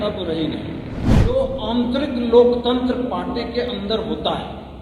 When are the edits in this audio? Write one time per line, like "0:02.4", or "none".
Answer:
0:01.1